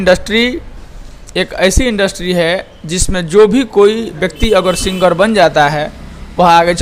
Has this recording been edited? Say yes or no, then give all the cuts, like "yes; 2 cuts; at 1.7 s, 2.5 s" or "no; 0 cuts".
no; 0 cuts